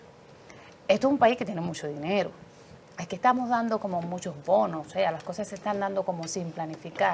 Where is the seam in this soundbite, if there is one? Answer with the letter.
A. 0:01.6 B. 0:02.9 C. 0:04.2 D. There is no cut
D